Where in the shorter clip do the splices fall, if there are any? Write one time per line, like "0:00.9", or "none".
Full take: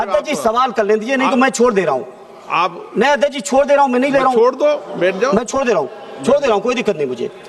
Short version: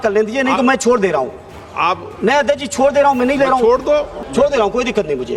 0:04.1